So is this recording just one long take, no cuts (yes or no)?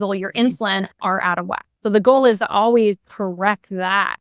no